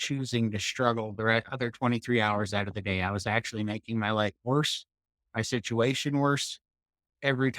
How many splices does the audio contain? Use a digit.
1